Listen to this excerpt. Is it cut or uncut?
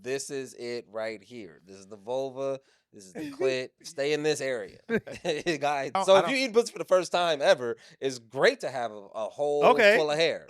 cut